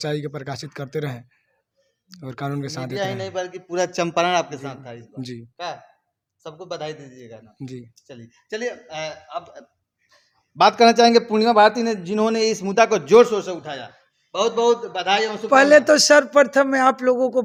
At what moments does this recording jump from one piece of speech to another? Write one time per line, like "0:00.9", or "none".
none